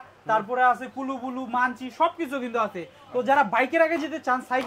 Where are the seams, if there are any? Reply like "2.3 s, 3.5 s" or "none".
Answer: none

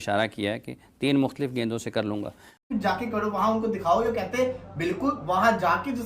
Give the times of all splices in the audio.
2.7 s

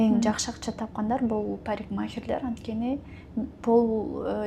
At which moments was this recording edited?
none

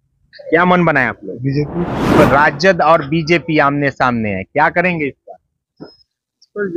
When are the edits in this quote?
2.2 s

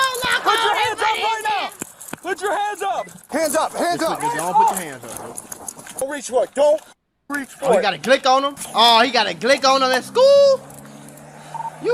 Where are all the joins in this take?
3.1 s, 6.0 s, 8.6 s

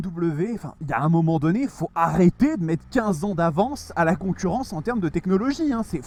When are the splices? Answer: none

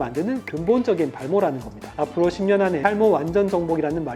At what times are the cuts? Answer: 2.0 s

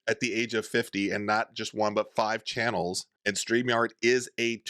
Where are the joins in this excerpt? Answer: 3.1 s

